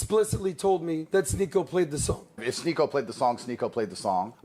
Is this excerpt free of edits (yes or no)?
no